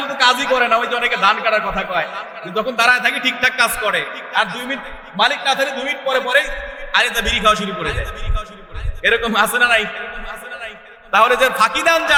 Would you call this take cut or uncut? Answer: uncut